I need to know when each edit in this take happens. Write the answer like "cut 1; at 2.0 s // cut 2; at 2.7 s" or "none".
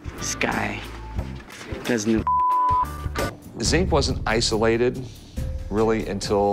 cut 1; at 3.1 s